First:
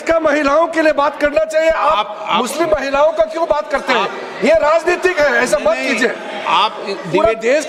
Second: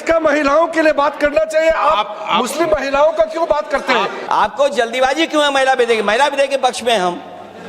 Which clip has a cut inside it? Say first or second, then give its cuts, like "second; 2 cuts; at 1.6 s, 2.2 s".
second; 1 cut; at 4.2 s